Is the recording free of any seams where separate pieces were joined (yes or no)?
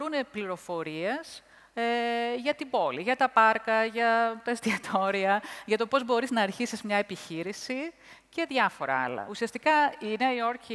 yes